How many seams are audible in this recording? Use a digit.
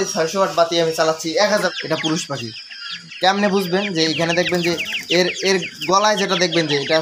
1